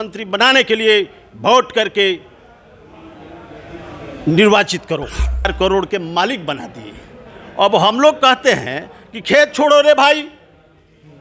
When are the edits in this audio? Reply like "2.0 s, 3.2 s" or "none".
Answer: 5.5 s